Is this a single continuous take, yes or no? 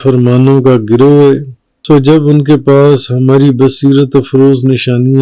no